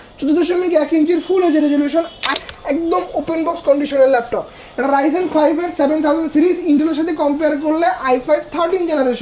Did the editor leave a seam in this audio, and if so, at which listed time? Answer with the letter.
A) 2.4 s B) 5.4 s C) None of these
A